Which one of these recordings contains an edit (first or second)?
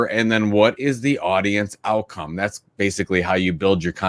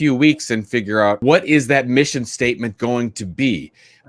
second